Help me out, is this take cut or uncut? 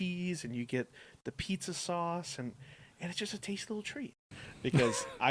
cut